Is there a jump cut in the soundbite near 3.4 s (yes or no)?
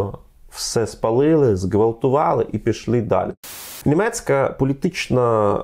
yes